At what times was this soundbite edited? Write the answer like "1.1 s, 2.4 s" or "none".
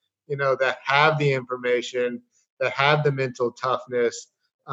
none